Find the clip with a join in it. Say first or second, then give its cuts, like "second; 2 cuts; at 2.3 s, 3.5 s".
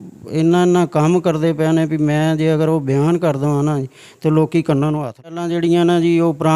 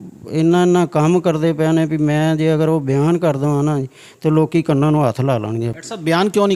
first; 1 cut; at 5.4 s